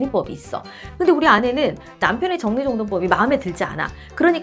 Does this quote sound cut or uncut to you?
uncut